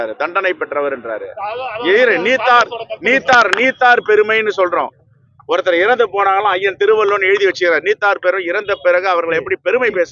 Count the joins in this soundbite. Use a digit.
0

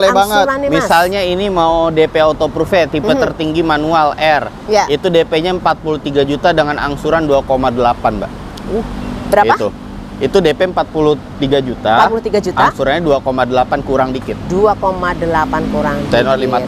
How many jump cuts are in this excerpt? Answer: 0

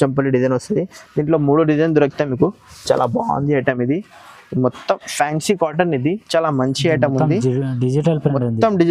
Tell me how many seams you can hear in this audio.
0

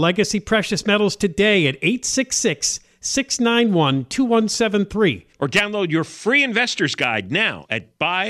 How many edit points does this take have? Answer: 0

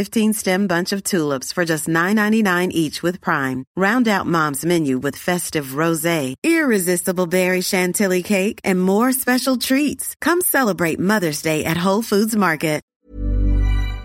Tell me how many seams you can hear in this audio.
1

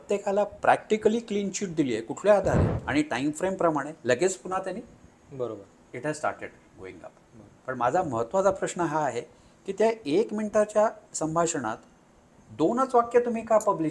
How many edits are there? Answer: 1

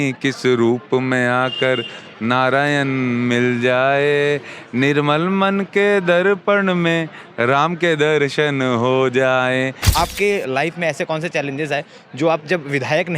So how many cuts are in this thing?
1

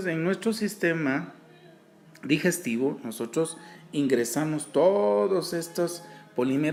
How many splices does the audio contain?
0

